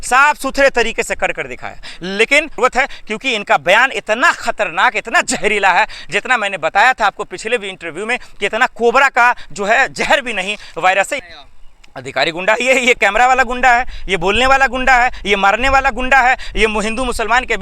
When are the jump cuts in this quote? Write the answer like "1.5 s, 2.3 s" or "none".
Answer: 2.6 s, 11.3 s